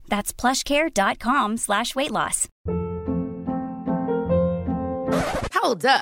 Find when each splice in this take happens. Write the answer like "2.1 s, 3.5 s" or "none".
2.5 s